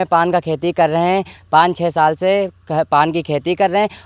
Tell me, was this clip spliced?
yes; 1 cut; at 1.4 s

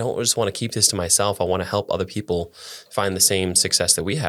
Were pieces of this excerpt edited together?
no; 0 cuts

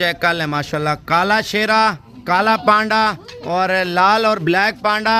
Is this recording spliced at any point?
no; 0 cuts

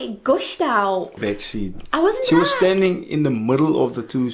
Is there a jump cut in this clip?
yes; 1 cut; at 1.2 s

